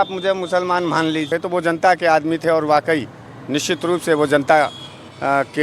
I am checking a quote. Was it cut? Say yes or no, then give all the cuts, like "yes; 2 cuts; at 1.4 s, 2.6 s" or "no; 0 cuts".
yes; 1 cut; at 1.3 s